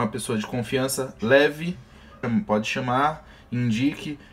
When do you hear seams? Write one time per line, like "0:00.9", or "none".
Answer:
0:02.2